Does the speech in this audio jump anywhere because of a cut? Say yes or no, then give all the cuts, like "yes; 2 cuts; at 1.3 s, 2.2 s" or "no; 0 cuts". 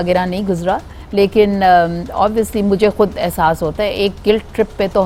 no; 0 cuts